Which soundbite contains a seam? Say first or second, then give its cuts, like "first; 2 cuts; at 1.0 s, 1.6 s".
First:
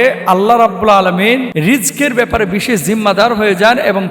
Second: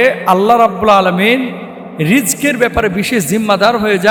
first; 1 cut; at 1.5 s